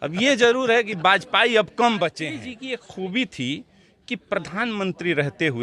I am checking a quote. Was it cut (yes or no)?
yes